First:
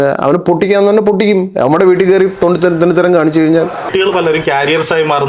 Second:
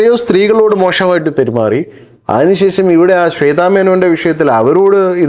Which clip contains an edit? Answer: first; 1 cut; at 3.9 s

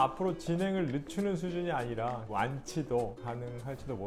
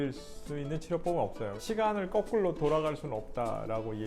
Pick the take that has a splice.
second; 1 cut; at 1.6 s

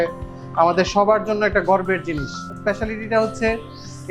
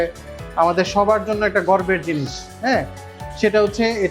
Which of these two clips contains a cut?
first; 1 cut; at 2.5 s

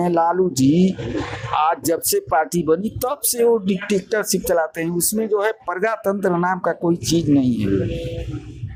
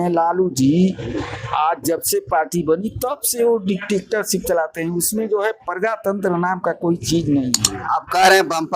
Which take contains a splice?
second; 1 cut; at 7.7 s

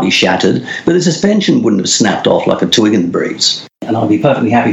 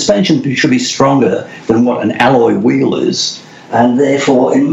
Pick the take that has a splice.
first; 1 cut; at 3.8 s

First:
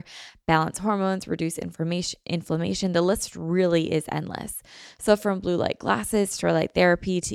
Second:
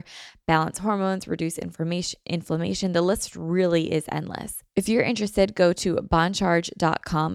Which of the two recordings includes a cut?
second; 1 cut; at 4.6 s

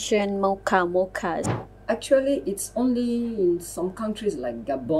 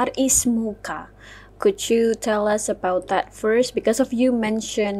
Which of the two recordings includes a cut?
first; 1 cut; at 1.4 s

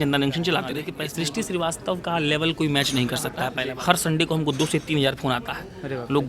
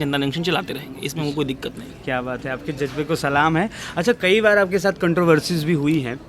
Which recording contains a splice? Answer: first; 2 cuts; at 0.9 s, 3.6 s

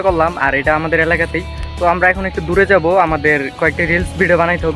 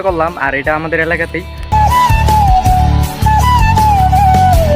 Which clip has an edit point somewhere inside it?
second; 1 cut; at 1.7 s

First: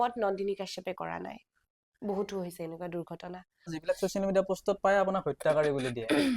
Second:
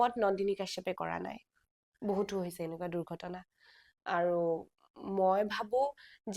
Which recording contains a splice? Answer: first; 1 cut; at 3.8 s

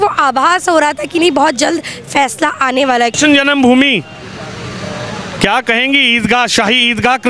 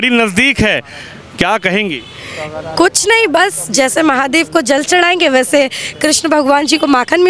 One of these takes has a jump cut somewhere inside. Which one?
first; 1 cut; at 3.1 s

